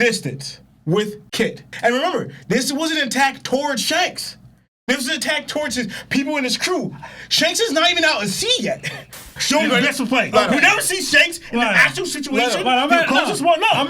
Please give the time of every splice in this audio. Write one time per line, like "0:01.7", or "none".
0:09.3